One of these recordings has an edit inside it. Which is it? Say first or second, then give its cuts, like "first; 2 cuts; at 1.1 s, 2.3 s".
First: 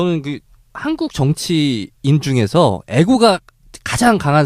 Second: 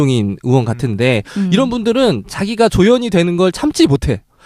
first; 1 cut; at 1.6 s